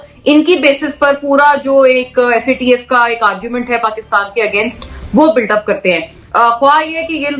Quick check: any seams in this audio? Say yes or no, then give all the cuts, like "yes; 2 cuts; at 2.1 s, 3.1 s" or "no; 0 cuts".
no; 0 cuts